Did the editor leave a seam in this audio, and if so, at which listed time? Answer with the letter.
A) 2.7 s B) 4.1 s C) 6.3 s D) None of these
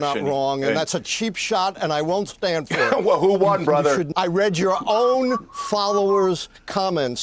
B